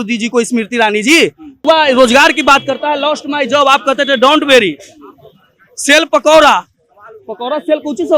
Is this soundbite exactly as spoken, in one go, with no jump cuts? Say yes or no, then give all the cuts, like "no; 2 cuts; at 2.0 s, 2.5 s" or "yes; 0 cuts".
no; 1 cut; at 1.6 s